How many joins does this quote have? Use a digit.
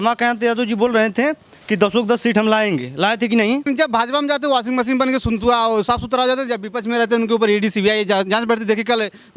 1